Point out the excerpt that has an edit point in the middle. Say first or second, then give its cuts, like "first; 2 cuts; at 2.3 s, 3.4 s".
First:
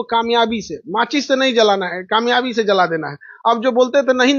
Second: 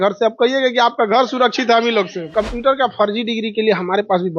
second; 1 cut; at 2.2 s